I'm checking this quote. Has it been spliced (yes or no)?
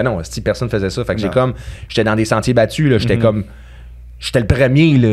no